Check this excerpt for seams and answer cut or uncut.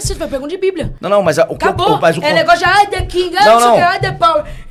uncut